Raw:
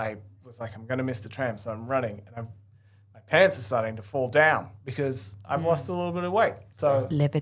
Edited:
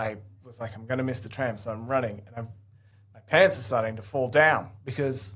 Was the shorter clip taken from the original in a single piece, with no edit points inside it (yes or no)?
yes